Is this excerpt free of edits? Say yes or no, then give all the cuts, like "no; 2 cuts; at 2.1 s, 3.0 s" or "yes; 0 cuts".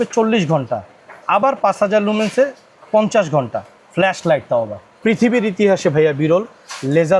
no; 1 cut; at 4.9 s